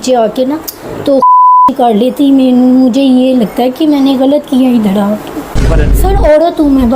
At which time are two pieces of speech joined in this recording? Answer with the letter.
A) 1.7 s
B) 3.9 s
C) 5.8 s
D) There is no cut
C